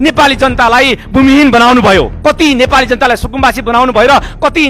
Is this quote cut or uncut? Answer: cut